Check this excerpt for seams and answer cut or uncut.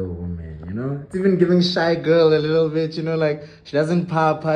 uncut